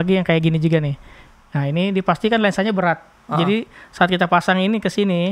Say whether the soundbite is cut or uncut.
uncut